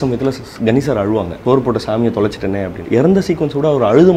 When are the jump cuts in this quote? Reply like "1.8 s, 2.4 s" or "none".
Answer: 1.3 s, 2.8 s